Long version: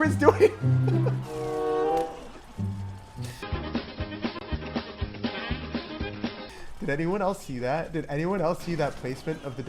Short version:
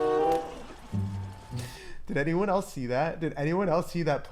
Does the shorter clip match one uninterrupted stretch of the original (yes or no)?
no